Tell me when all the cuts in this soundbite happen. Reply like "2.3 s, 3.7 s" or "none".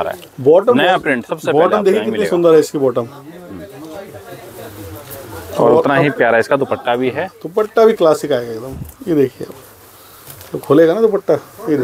none